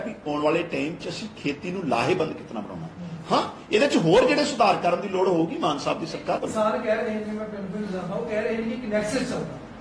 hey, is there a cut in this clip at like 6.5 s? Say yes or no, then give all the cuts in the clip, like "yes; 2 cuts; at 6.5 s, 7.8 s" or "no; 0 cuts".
yes; 1 cut; at 6.5 s